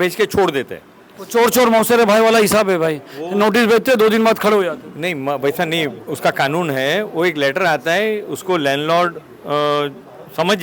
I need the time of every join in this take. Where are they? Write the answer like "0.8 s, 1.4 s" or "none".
none